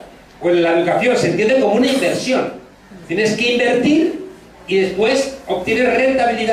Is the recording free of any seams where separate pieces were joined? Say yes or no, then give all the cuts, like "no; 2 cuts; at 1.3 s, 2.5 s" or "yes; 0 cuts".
no; 1 cut; at 4.9 s